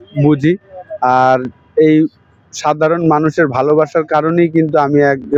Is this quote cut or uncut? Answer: uncut